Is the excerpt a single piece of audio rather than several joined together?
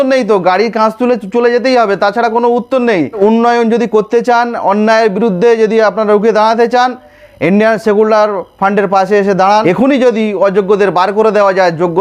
no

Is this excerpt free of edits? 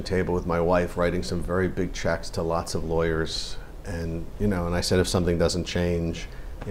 yes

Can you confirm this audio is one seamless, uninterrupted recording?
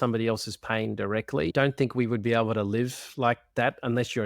no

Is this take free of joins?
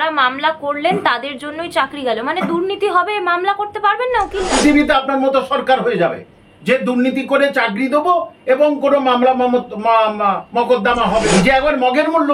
no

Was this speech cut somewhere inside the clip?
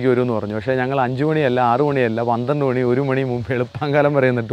no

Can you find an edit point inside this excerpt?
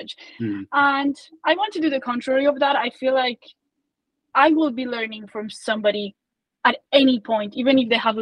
no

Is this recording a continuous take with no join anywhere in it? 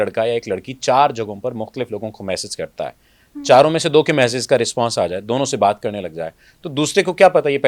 yes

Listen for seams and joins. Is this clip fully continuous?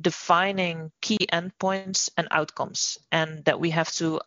yes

